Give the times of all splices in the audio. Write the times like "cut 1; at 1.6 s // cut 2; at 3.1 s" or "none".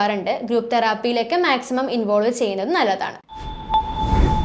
cut 1; at 3.2 s